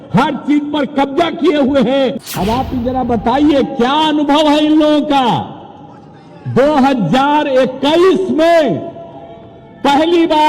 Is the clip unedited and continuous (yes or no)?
no